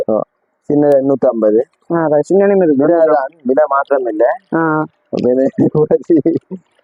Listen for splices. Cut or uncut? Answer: uncut